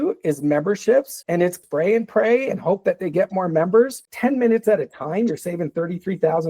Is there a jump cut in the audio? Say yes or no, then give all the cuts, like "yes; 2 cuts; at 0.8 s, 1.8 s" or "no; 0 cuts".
yes; 2 cuts; at 1.6 s, 4.1 s